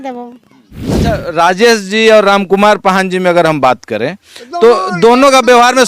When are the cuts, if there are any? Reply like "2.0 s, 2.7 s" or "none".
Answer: 1.0 s